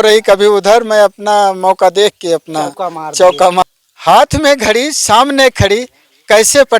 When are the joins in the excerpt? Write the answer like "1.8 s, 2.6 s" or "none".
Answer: 3.6 s